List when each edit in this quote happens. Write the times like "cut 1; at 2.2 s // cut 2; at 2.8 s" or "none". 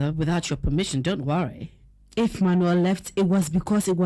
cut 1; at 2.3 s